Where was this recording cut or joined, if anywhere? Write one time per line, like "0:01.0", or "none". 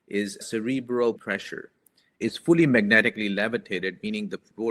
0:02.1